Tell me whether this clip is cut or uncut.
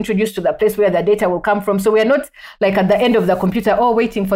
uncut